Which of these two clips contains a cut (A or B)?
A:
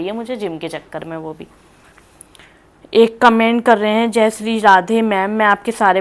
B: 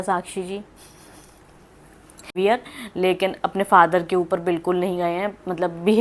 B